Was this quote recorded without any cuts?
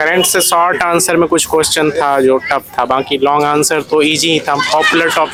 yes; 0 cuts

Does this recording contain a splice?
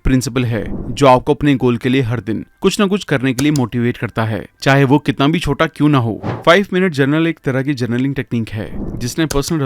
yes; 1 cut; at 6.3 s

